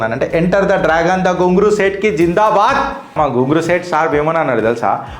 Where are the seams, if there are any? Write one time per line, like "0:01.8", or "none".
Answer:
0:03.1